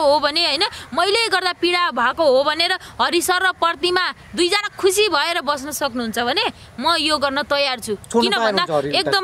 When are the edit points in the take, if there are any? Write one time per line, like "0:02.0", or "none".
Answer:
none